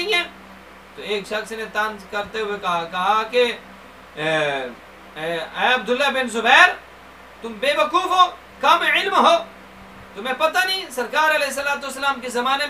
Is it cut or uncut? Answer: uncut